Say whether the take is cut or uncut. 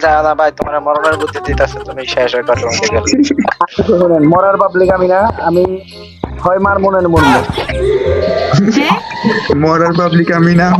cut